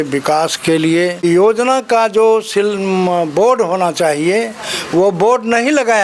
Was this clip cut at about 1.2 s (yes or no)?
yes